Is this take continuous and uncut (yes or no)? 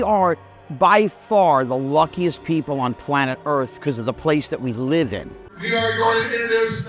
no